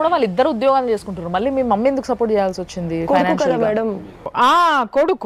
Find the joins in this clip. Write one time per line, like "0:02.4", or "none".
none

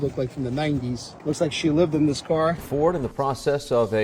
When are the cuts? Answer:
0:01.1
0:02.6

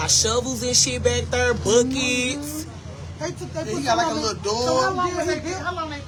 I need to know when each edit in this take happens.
none

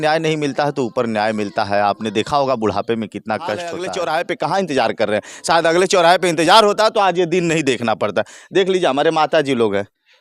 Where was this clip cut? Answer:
0:03.9

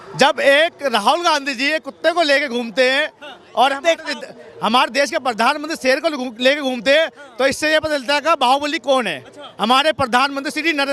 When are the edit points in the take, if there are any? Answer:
none

